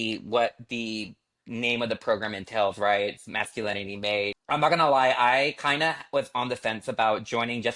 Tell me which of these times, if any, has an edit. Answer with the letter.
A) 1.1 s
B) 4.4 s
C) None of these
B